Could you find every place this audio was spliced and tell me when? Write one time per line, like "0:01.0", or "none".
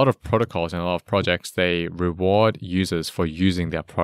none